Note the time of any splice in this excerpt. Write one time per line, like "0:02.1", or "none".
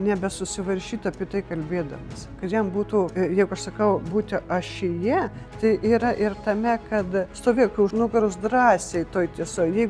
0:03.1
0:07.8